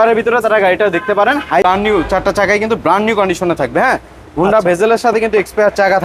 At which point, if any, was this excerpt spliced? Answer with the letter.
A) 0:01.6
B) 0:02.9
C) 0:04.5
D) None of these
A